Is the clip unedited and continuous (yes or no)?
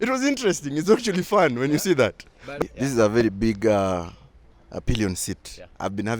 no